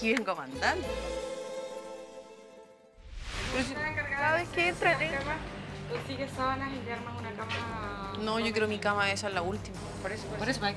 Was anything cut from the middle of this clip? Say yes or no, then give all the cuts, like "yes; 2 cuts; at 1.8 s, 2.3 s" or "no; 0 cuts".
yes; 1 cut; at 3.3 s